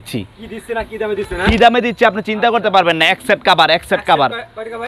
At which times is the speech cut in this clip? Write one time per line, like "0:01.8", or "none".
none